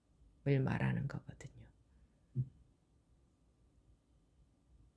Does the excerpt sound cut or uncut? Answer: uncut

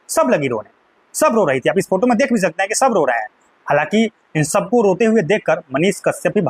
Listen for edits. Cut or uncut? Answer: uncut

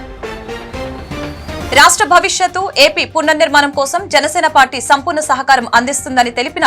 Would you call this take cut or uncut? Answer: cut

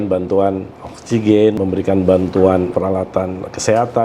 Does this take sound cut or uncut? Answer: cut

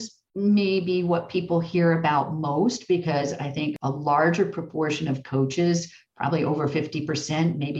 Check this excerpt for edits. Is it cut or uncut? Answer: cut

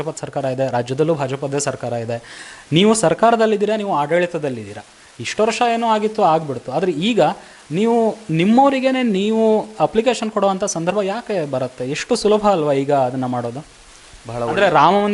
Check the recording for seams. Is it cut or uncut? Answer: uncut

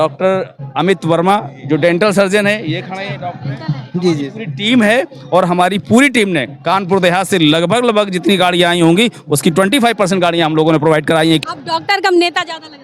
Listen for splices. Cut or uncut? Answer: cut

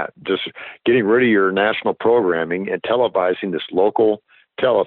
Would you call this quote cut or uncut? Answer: uncut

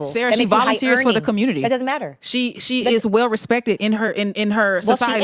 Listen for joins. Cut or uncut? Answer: cut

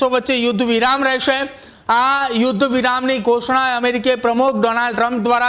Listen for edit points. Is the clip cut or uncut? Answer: uncut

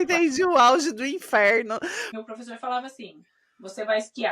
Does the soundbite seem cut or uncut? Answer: cut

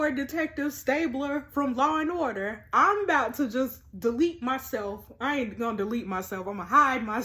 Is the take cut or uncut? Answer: uncut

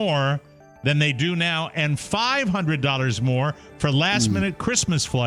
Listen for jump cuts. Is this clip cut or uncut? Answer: uncut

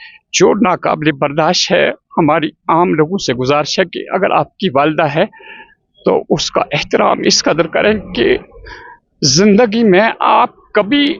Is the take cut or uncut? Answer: uncut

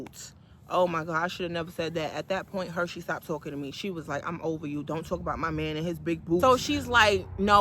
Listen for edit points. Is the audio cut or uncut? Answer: cut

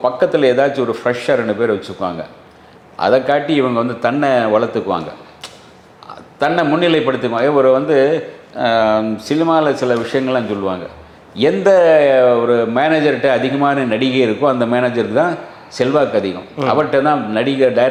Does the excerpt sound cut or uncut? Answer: uncut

